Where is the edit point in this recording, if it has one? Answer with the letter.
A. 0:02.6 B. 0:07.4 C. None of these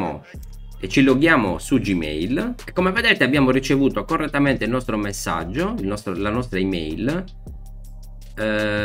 A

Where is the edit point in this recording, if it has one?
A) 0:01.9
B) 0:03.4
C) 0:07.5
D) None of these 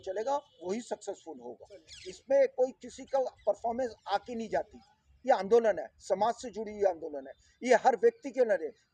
A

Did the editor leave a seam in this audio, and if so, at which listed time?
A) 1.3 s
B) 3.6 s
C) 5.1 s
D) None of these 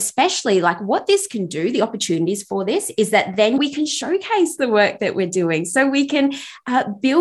B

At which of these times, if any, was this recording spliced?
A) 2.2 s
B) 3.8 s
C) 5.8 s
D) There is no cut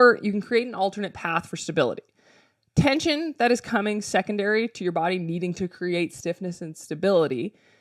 D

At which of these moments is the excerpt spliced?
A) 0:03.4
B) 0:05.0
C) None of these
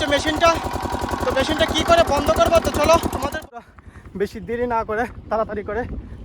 A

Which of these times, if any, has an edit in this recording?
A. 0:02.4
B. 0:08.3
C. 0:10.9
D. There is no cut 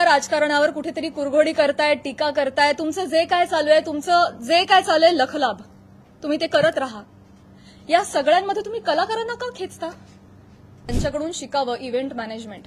C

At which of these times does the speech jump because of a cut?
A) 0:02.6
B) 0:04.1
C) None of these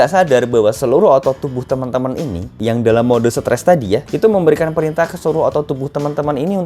A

